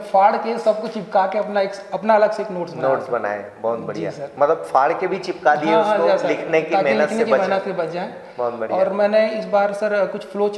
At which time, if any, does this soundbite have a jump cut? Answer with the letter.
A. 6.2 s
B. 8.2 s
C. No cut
C